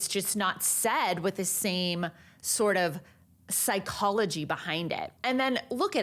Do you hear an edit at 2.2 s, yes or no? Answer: no